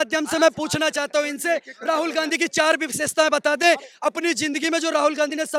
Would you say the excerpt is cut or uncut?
uncut